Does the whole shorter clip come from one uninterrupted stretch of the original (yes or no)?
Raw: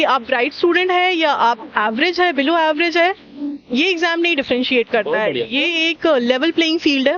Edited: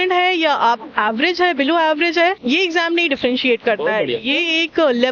no